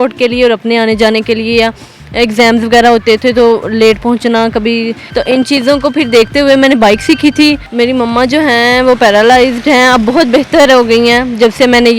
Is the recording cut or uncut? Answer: cut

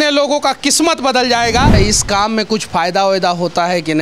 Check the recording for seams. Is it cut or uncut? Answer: cut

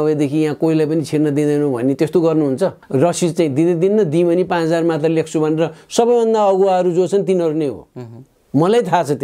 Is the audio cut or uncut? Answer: cut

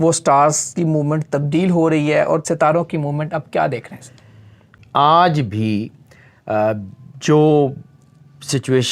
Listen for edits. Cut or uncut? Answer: cut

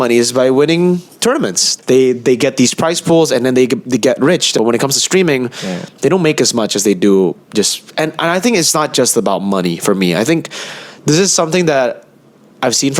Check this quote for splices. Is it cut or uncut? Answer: cut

